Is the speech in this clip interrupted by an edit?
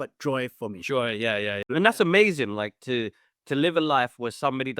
yes; 1 cut; at 1.7 s

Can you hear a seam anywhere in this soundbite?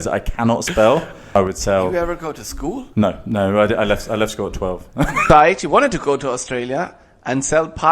yes; 2 cuts; at 1.3 s, 5.2 s

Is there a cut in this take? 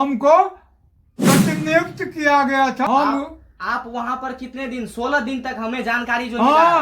yes; 1 cut; at 2.9 s

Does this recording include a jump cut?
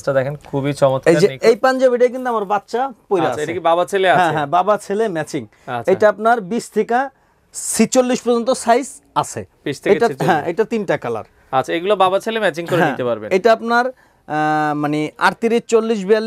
no; 0 cuts

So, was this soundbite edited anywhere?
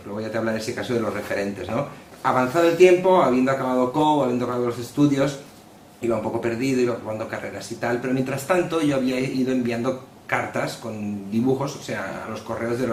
no; 0 cuts

